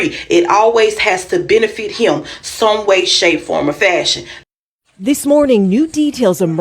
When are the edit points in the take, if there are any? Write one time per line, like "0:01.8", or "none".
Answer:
0:04.3

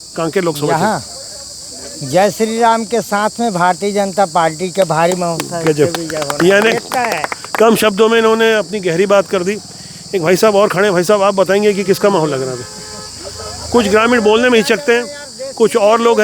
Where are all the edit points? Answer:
none

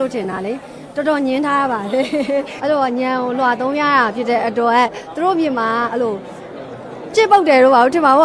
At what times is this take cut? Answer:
0:02.5

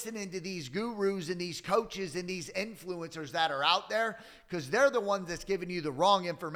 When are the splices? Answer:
none

